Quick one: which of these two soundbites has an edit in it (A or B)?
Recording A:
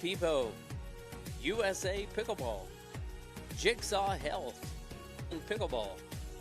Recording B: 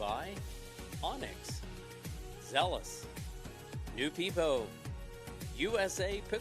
A